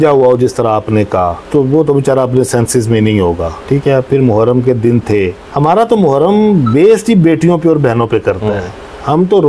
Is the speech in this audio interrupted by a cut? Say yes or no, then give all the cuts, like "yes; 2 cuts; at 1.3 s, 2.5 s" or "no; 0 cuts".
no; 0 cuts